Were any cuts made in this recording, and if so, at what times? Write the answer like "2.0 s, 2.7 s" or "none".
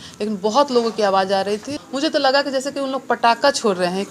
1.7 s

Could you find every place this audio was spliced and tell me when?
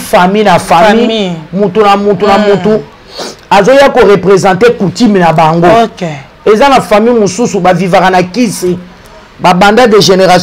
none

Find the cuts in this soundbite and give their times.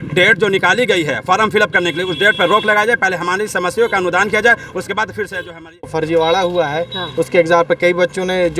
5.9 s

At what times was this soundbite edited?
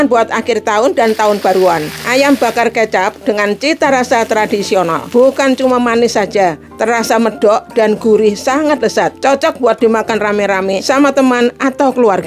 1.9 s, 5.0 s, 9.1 s, 10.8 s

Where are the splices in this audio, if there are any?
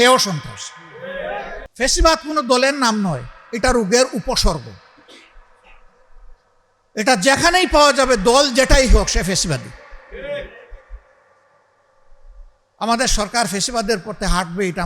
1.7 s

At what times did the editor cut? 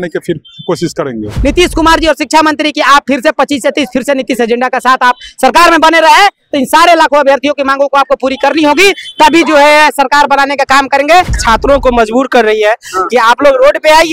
1.3 s, 11.3 s

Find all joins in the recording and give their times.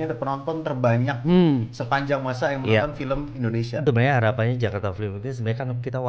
3.8 s

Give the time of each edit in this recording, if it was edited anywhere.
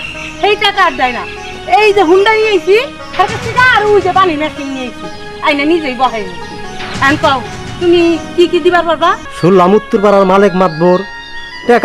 9.3 s

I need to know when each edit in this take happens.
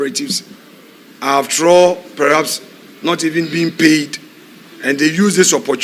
none

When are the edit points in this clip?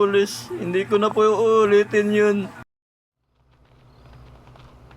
2.6 s

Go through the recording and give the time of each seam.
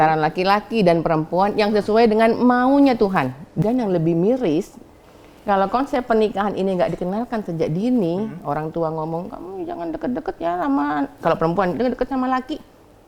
3.4 s

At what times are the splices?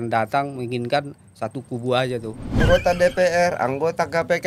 2.6 s

